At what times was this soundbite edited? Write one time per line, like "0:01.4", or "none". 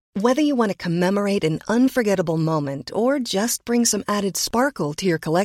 none